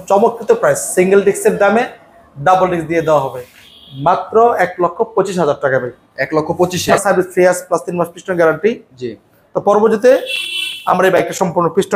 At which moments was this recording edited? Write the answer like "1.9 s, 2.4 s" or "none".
7.0 s

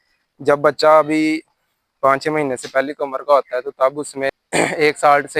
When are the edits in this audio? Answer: 4.4 s

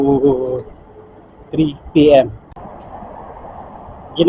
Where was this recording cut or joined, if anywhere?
2.5 s

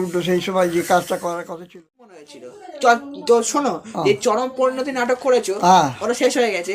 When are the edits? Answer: 2.2 s

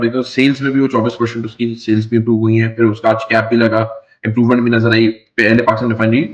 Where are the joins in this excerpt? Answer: none

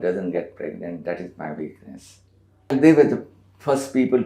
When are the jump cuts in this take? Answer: 2.7 s

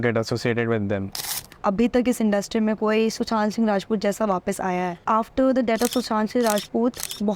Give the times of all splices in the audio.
1.4 s, 5.0 s

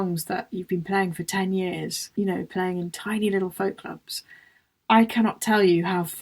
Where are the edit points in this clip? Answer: 2.0 s

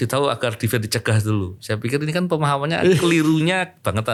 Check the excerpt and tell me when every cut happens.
none

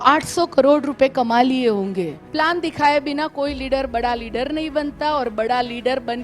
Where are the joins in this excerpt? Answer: 2.2 s

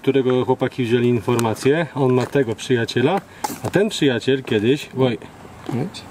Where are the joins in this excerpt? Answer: none

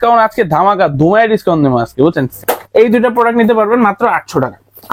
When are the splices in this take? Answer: 2.3 s

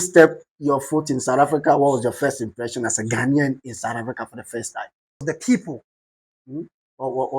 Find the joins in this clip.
5.1 s

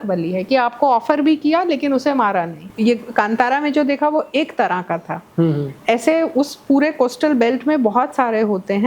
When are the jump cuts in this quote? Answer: 2.6 s

